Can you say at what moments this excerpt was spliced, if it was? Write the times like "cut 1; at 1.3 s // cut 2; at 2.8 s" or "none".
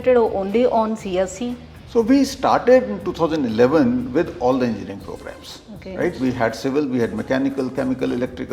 none